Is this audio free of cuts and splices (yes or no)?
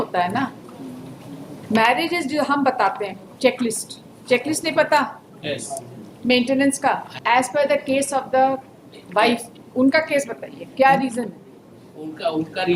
no